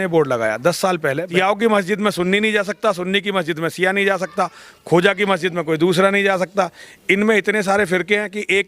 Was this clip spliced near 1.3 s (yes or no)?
yes